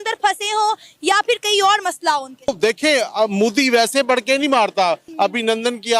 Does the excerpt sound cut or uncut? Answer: cut